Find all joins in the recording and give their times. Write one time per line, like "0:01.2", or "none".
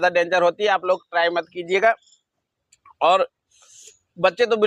none